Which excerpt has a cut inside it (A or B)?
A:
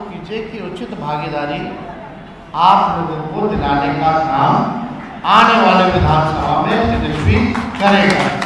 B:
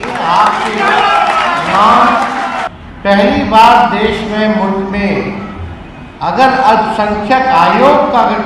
B